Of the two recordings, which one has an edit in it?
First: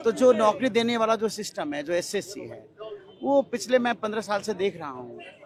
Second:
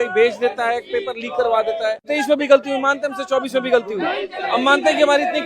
second; 1 cut; at 2.0 s

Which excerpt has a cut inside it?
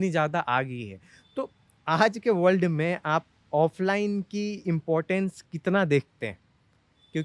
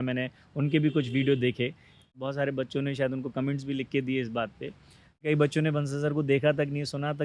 second; 2 cuts; at 2.2 s, 5.2 s

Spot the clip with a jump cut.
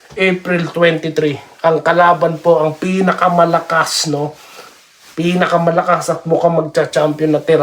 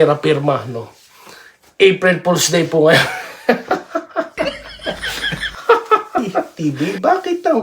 second; 1 cut; at 6.4 s

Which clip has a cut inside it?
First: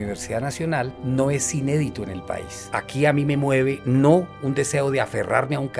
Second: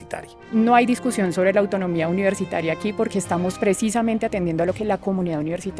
first; 2 cuts; at 1.0 s, 2.6 s

